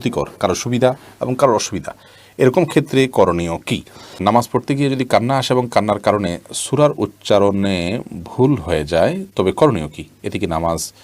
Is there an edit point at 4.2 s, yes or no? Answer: yes